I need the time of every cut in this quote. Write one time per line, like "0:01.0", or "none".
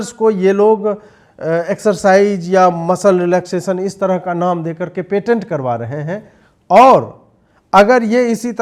none